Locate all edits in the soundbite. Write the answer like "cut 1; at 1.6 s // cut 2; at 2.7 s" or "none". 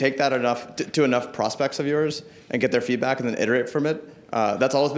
none